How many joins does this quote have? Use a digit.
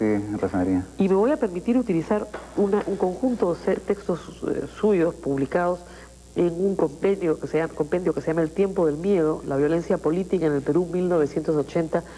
1